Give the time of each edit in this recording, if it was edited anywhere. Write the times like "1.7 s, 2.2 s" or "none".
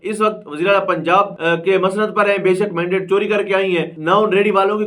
1.3 s, 3.9 s